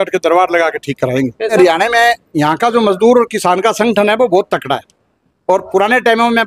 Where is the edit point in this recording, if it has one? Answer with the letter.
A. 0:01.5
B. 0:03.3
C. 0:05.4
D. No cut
A